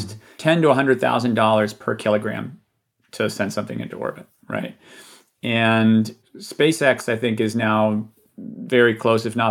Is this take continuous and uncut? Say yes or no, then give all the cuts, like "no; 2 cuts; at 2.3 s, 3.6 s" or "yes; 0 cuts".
yes; 0 cuts